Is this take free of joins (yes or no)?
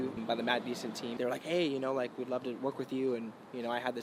yes